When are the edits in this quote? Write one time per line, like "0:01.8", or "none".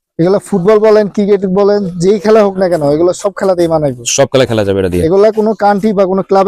none